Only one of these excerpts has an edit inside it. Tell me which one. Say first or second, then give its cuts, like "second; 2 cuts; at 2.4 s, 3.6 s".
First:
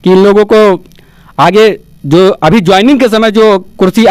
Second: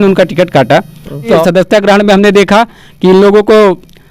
second; 1 cut; at 1.4 s